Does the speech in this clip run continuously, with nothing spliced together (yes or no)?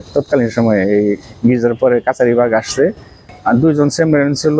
no